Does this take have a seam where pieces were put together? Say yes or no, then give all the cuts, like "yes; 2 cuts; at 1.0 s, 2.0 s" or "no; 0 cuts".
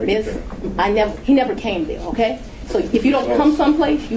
no; 0 cuts